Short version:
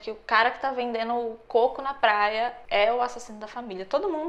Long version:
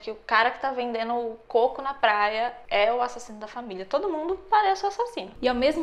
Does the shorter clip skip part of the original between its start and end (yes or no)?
no